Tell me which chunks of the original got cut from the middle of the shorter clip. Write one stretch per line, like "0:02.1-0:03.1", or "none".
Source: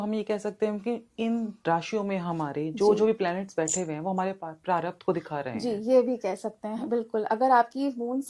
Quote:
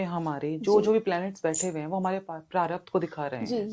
none